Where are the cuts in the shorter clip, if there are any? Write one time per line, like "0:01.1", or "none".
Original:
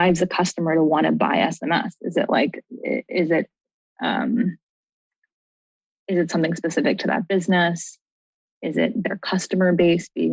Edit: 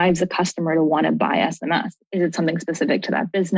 0:02.0